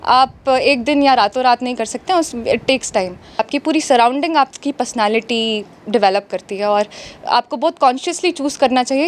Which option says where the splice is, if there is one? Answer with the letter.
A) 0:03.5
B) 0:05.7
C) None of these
A